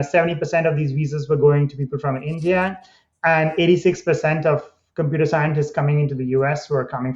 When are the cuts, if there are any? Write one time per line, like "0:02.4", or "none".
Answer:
none